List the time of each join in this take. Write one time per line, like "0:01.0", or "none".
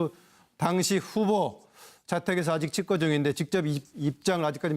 0:03.0